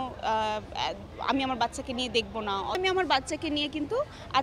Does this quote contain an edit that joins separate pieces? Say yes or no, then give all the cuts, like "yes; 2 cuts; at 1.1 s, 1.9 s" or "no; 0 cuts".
yes; 1 cut; at 2.8 s